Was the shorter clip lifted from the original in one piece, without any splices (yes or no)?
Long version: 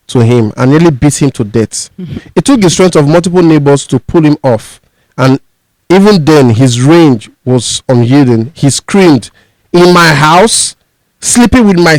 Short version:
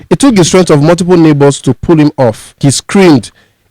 no